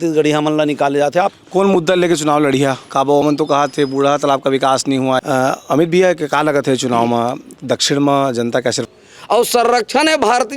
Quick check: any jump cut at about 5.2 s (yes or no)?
yes